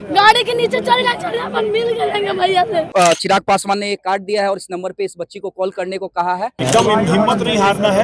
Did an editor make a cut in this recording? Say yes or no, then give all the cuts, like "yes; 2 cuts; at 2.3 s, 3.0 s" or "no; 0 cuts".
yes; 2 cuts; at 2.9 s, 6.6 s